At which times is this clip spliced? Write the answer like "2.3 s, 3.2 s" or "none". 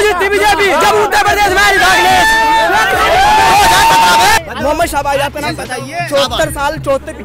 4.4 s